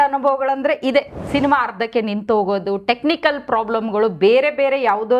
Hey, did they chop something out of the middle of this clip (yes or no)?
yes